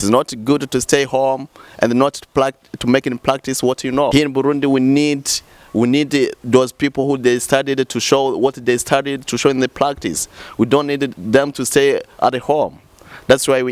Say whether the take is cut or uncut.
cut